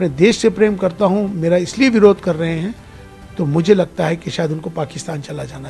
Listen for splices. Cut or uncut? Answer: uncut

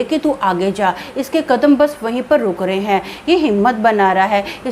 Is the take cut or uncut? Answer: uncut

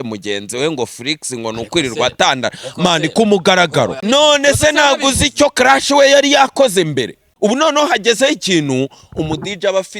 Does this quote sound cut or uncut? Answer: cut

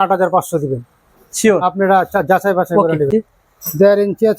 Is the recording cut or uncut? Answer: cut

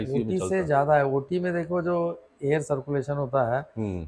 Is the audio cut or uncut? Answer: uncut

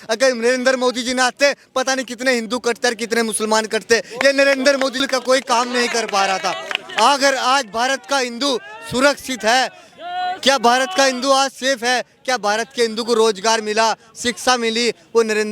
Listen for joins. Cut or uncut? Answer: cut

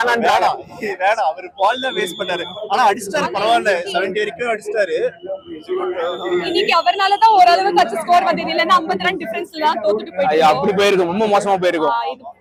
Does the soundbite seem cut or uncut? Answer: uncut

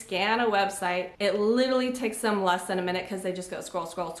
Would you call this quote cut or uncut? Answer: cut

